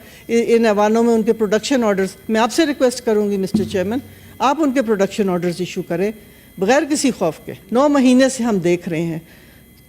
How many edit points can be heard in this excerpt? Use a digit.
1